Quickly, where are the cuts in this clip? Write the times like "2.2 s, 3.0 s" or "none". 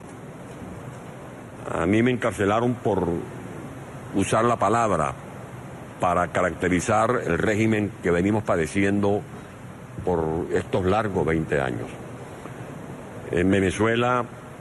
10.6 s